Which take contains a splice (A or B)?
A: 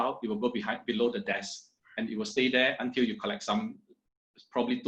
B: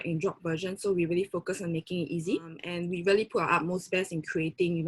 B